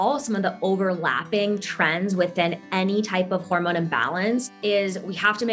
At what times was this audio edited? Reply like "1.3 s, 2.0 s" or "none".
4.5 s